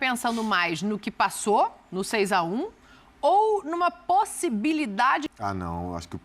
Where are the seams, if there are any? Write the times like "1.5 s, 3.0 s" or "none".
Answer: 5.3 s